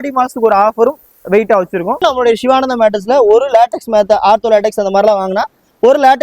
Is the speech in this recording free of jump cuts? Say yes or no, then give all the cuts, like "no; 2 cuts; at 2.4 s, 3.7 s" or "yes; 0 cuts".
no; 1 cut; at 2.0 s